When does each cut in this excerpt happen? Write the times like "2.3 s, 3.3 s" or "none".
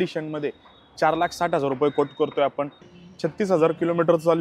2.9 s